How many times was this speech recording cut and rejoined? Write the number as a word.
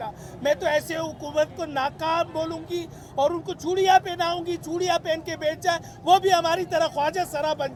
zero